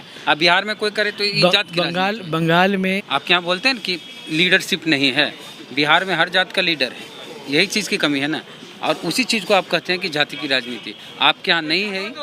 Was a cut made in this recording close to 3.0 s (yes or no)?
yes